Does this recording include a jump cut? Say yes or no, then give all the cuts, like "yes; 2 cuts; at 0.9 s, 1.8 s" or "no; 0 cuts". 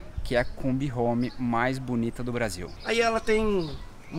yes; 1 cut; at 2.7 s